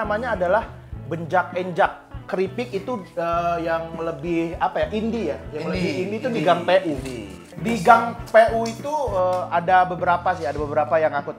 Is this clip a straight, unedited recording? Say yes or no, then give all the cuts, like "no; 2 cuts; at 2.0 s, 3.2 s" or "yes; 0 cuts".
no; 2 cuts; at 2.3 s, 7.5 s